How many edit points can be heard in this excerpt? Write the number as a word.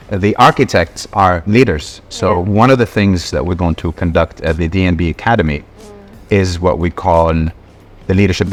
zero